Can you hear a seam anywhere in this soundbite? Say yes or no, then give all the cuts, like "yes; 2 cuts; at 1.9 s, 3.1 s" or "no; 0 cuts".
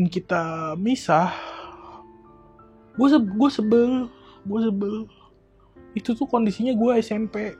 no; 0 cuts